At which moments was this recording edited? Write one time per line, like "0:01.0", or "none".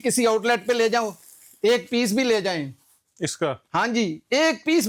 none